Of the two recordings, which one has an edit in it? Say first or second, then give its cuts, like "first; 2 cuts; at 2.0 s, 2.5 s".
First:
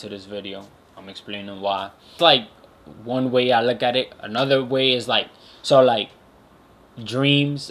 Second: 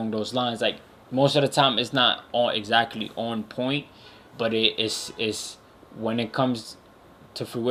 first; 1 cut; at 2.2 s